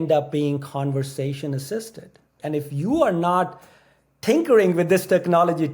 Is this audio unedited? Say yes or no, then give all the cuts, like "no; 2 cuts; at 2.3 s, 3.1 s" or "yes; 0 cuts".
no; 1 cut; at 2.3 s